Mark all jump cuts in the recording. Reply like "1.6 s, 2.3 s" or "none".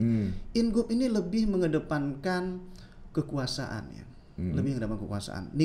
none